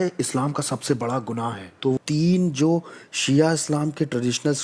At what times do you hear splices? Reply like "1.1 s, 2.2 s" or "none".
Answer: 2.0 s